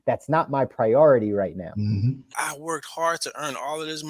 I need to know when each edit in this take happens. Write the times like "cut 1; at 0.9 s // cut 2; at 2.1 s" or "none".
cut 1; at 2.3 s